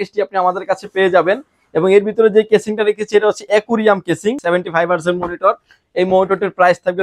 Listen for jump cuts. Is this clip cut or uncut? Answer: cut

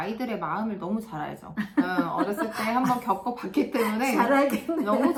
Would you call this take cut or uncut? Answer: uncut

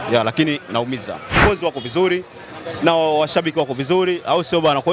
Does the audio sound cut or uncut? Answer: cut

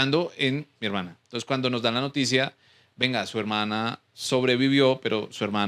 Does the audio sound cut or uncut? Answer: uncut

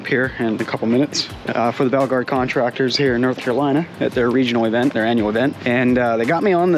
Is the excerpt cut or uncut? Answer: cut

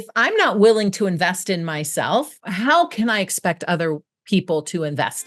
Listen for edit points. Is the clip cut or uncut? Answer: uncut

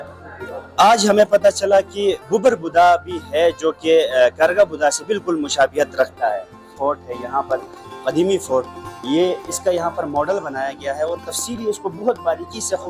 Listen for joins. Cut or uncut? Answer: cut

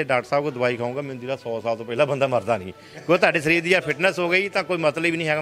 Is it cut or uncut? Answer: uncut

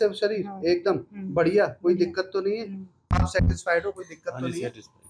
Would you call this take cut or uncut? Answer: cut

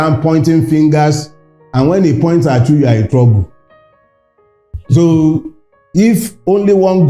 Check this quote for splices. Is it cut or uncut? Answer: uncut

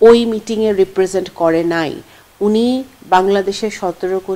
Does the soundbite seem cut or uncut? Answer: uncut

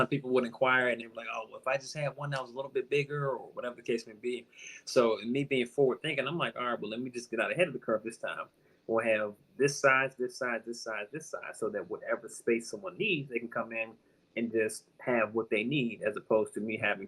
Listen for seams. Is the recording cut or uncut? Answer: cut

